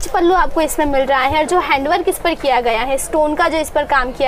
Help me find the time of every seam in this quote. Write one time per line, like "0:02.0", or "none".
none